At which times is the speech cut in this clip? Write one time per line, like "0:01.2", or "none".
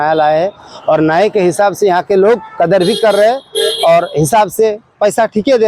none

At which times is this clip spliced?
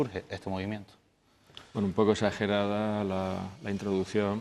none

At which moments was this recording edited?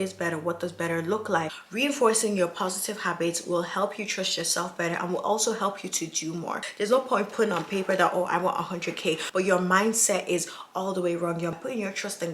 0:01.5
0:06.7
0:09.2
0:11.5

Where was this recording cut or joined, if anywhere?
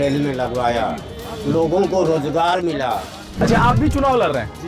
0:03.4

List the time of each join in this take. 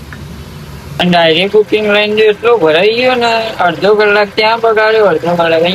0:01.0

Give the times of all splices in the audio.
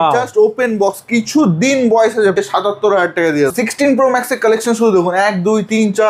0:02.4
0:03.5

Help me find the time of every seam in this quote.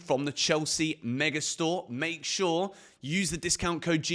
none

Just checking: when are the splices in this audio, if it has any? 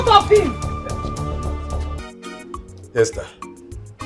0:01.9

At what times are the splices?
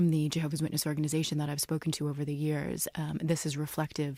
none

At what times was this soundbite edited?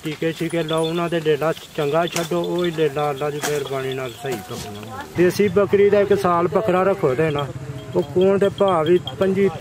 0:05.1

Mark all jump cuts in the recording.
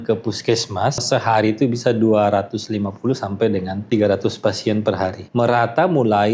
0:01.0
0:03.8
0:05.2

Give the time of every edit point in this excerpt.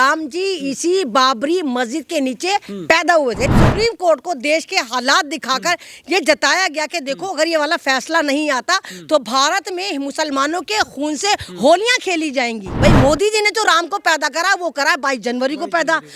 0:03.5
0:12.6

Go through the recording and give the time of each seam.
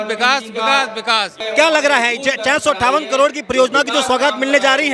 0:01.4

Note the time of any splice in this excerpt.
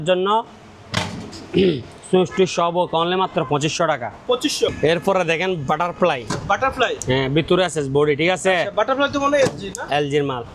none

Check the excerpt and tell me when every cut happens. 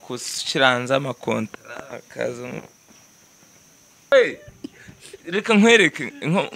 0:04.1

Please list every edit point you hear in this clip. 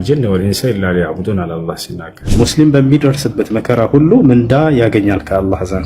0:02.2

